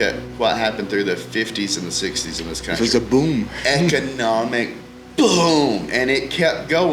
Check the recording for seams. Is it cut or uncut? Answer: uncut